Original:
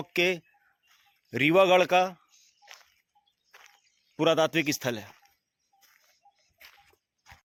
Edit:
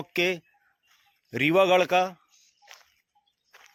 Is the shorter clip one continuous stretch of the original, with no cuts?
yes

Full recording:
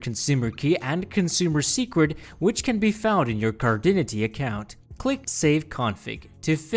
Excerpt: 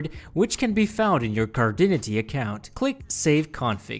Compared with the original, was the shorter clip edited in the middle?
yes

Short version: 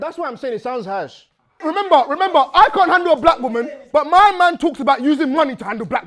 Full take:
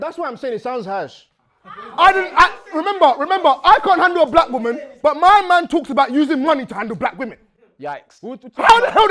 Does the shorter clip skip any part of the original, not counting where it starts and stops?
yes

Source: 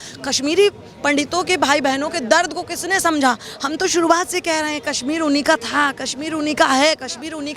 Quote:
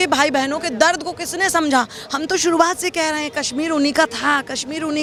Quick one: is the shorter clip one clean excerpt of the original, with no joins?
yes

